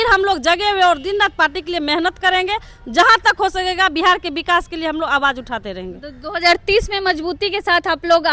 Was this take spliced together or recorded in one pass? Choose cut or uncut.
uncut